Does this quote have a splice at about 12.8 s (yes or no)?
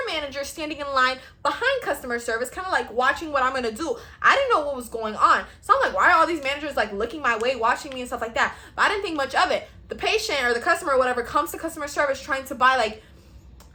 no